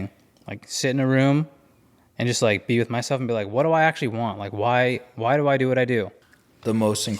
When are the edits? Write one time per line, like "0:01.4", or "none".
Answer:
0:06.2